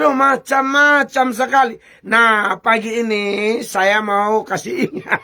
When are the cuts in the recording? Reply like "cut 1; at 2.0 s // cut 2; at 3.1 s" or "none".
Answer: none